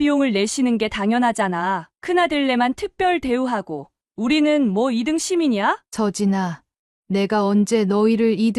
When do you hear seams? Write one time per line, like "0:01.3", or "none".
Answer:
0:05.9